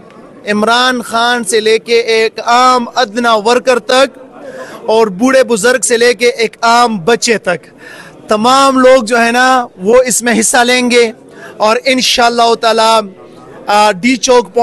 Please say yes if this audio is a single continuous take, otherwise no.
yes